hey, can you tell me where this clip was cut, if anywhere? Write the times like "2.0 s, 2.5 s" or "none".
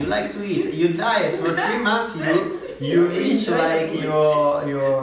none